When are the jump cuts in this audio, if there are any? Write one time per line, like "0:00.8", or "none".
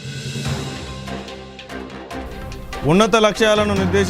0:02.4

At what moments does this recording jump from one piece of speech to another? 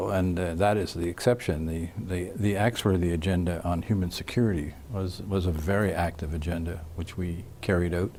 none

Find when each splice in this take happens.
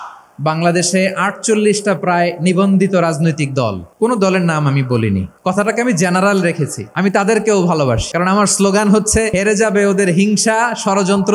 0:03.8
0:05.3
0:06.8
0:08.1
0:09.3

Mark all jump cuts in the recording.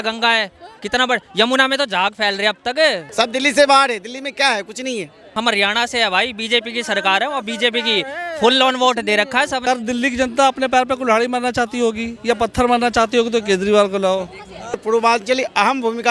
0:03.0
0:05.3
0:09.6
0:14.8

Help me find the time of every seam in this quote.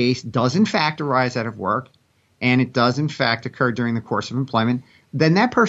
none

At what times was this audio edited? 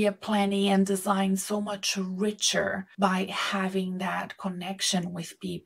0:02.9

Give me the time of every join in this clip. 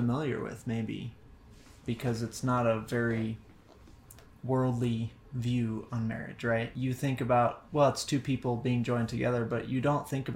0:01.2
0:06.7

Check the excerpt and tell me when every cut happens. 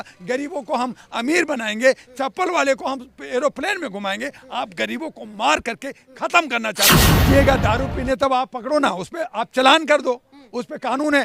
0:07.1

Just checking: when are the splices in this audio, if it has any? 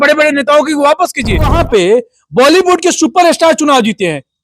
0:01.6

